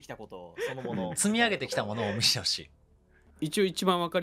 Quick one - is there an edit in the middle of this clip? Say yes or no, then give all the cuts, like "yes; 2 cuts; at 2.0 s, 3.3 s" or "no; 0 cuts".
yes; 1 cut; at 3.2 s